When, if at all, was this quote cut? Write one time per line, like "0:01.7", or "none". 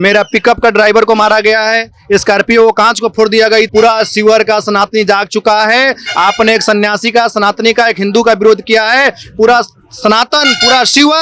0:03.7